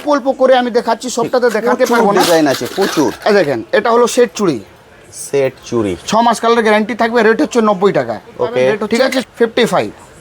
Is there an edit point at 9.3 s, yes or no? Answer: yes